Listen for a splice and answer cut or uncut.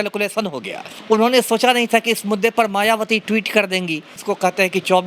cut